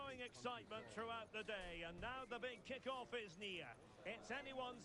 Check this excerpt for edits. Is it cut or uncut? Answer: uncut